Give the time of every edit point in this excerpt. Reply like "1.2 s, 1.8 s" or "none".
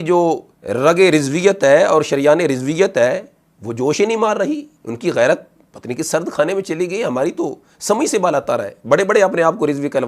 none